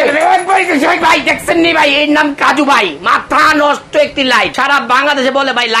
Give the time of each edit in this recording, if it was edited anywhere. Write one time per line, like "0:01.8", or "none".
0:04.5